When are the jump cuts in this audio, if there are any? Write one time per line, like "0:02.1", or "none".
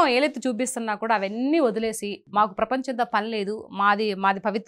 0:02.1